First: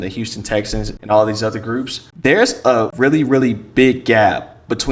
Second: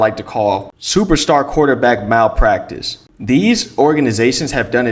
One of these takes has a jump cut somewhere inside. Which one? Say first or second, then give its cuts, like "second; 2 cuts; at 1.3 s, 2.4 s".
first; 3 cuts; at 0.9 s, 2.0 s, 2.9 s